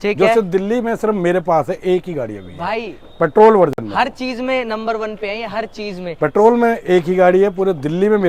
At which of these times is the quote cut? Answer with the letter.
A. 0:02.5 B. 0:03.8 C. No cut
C